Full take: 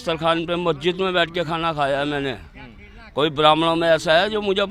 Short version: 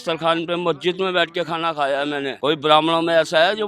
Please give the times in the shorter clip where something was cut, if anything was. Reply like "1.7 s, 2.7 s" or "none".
2.3 s